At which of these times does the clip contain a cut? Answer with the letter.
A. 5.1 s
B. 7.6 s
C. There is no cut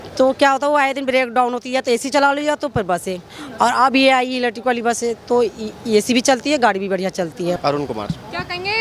B